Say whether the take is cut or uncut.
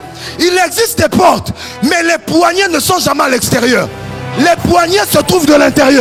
uncut